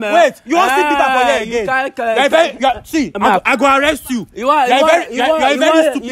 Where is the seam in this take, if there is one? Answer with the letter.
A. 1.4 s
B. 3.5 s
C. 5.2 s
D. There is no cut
D